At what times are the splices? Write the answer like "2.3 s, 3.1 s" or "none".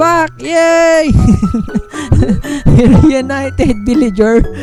none